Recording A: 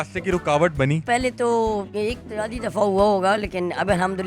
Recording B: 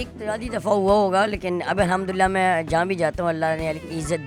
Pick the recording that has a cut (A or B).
A